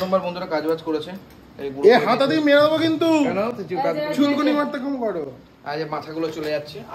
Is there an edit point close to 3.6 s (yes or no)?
no